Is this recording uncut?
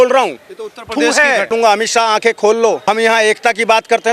no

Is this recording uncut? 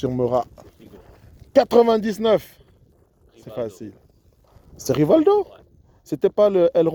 yes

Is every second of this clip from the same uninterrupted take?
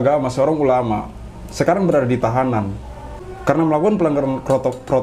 yes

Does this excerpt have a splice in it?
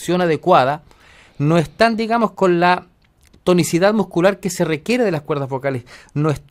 no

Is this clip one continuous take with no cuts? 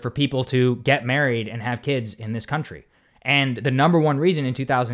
yes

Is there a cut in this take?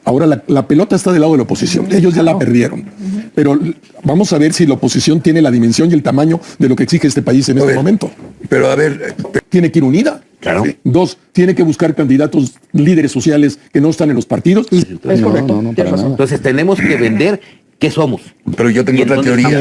yes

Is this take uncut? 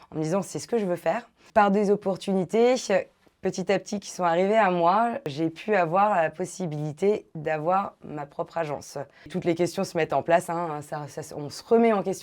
no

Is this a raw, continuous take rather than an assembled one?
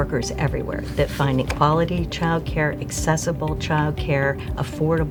yes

